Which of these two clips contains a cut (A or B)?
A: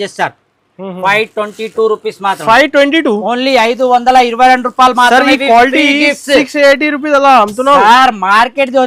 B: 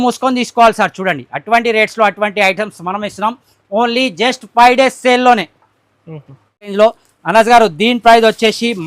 B